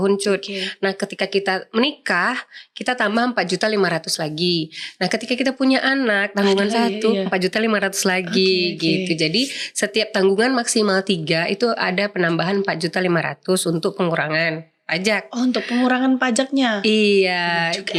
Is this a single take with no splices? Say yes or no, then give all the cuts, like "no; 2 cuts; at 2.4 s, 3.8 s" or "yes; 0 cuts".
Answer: yes; 0 cuts